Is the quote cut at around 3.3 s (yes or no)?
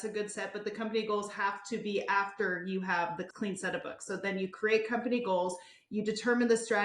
yes